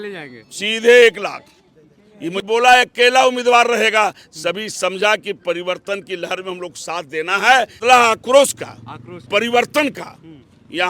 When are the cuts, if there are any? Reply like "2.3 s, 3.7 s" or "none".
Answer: 2.4 s, 7.8 s